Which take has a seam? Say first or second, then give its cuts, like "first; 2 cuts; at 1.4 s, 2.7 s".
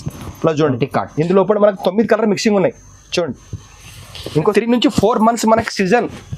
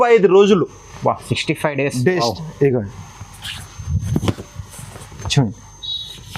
first; 1 cut; at 4.5 s